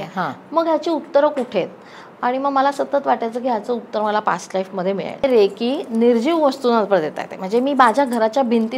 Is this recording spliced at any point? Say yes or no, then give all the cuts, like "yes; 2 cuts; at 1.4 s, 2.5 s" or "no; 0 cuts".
yes; 1 cut; at 5.2 s